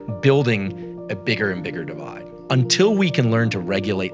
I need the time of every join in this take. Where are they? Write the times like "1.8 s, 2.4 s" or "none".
2.3 s